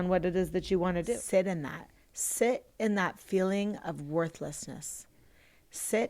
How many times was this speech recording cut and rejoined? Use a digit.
1